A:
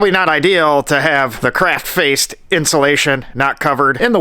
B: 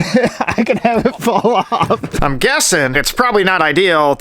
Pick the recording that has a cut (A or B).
B